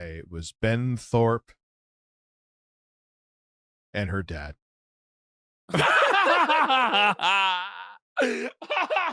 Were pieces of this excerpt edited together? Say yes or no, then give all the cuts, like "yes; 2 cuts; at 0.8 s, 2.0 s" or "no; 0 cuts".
no; 0 cuts